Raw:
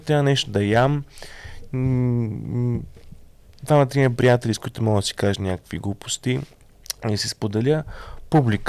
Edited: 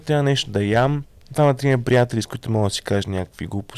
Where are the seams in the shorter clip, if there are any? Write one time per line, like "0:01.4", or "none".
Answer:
0:01.1